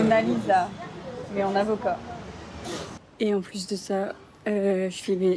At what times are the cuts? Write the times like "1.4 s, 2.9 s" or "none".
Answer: 2.9 s